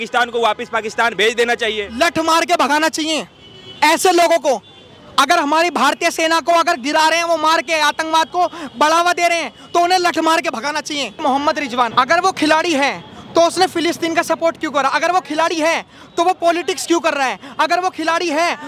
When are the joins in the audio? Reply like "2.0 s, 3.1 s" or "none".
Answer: 11.5 s